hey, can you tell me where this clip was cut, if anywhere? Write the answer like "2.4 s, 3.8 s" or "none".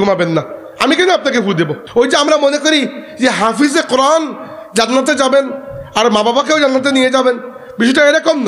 1.8 s